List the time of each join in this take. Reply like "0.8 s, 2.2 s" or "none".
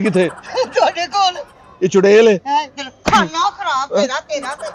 none